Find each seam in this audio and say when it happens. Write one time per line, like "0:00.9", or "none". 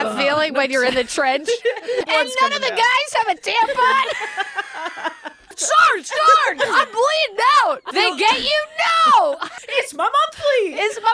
0:02.1
0:05.6
0:07.9
0:09.5